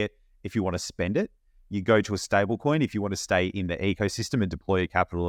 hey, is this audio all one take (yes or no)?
yes